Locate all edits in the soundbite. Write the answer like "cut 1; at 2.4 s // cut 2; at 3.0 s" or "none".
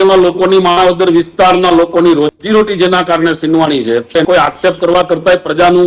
cut 1; at 4.1 s

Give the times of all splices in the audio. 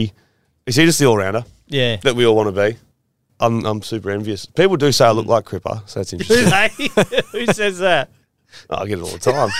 cut 1; at 3.3 s

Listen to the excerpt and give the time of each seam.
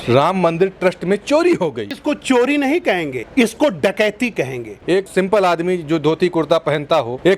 cut 1; at 2.0 s // cut 2; at 4.7 s

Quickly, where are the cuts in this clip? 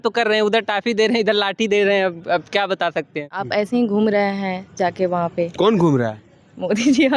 cut 1; at 3.3 s

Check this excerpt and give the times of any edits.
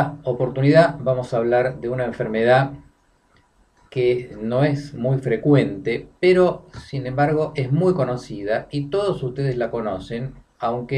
none

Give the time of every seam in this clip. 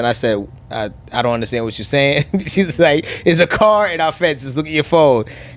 none

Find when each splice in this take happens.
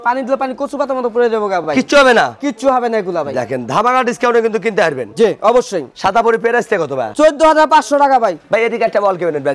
none

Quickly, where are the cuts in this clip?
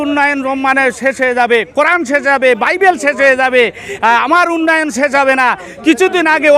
none

